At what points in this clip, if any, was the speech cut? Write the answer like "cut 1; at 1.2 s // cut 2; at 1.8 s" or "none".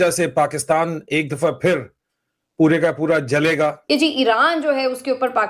cut 1; at 3.8 s